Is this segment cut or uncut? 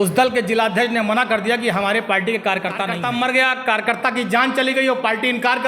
cut